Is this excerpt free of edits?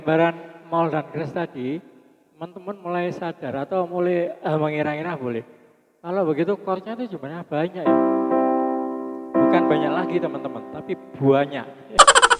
yes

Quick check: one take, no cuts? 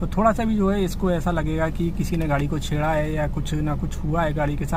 yes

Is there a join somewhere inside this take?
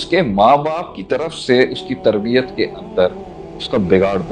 no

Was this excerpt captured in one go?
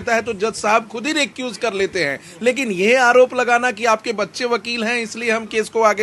yes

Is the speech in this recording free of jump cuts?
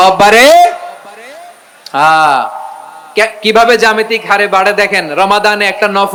yes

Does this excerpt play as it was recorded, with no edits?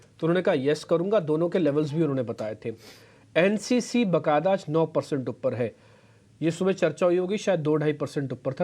no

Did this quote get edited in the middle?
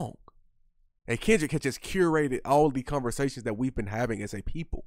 no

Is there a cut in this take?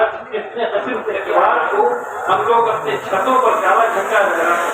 yes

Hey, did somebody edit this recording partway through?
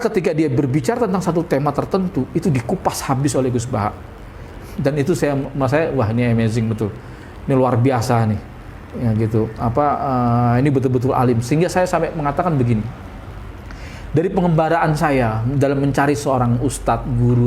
no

